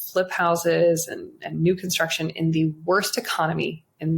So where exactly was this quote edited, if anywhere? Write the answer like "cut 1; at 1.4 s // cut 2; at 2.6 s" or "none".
none